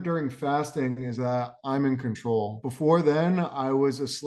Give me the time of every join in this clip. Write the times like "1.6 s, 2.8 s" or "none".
2.6 s